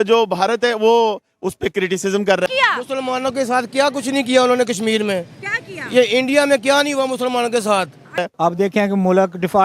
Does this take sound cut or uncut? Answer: cut